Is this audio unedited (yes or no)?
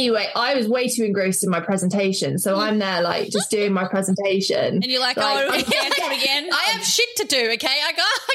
yes